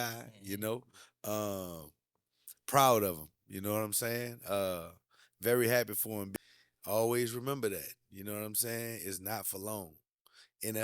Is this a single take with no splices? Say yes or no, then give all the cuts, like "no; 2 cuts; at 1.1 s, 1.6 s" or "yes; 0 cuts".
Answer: no; 1 cut; at 6.3 s